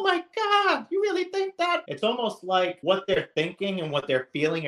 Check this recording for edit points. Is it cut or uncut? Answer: cut